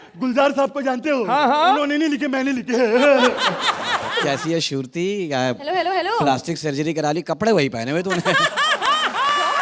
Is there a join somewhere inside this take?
yes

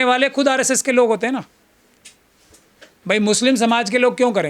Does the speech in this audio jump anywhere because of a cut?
no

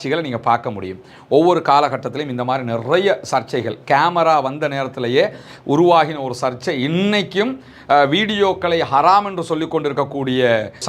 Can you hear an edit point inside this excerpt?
no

